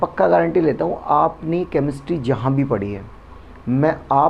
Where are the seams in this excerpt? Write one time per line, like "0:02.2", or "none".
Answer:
none

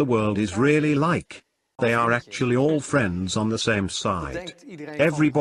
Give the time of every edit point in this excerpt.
0:01.7

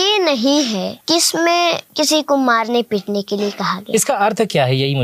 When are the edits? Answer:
0:00.9
0:01.9

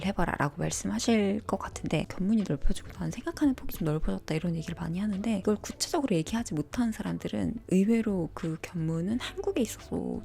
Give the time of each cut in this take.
0:02.1
0:05.4

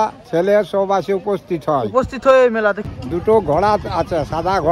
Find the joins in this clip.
0:02.9

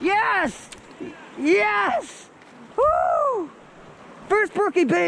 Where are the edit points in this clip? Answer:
none

